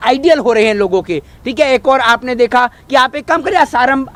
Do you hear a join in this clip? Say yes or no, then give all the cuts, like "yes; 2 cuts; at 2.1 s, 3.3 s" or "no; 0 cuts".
no; 0 cuts